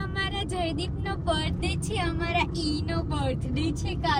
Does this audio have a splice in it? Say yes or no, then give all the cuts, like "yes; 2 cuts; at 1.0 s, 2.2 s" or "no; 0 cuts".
no; 0 cuts